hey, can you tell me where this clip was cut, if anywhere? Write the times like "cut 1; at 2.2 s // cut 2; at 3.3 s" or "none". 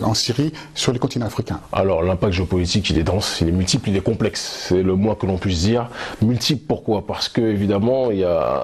none